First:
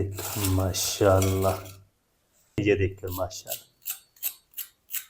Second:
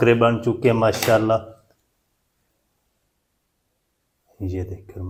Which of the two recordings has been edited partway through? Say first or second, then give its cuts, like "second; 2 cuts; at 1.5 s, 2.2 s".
first; 1 cut; at 2.6 s